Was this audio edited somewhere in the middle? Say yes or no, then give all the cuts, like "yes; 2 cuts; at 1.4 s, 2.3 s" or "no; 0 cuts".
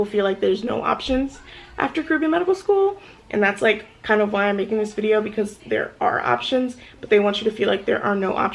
no; 0 cuts